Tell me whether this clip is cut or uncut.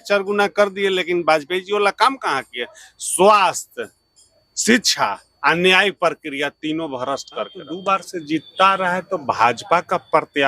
cut